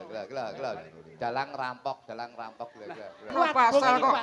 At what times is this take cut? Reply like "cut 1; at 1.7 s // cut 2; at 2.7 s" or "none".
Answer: cut 1; at 3.3 s